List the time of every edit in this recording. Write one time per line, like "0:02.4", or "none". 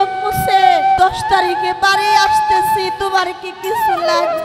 0:01.0